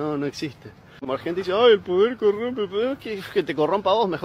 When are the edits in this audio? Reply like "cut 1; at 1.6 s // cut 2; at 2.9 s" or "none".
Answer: cut 1; at 1.0 s